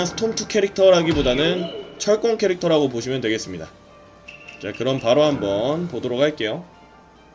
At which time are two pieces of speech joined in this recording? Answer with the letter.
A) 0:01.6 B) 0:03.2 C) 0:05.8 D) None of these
B